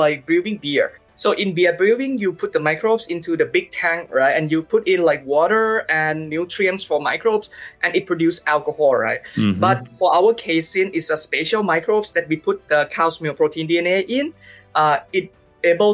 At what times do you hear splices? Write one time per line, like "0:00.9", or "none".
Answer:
none